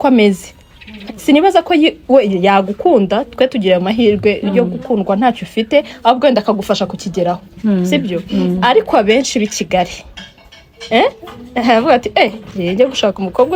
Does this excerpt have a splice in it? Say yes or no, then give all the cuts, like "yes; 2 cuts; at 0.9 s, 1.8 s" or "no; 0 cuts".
no; 0 cuts